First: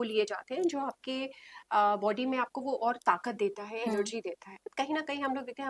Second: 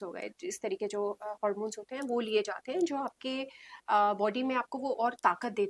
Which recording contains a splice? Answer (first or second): first